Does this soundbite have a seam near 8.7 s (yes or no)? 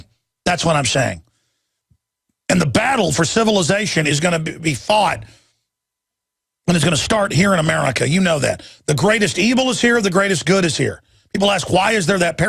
no